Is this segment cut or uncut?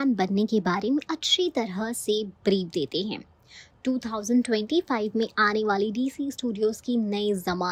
uncut